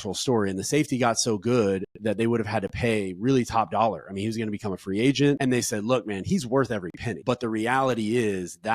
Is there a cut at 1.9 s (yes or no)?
no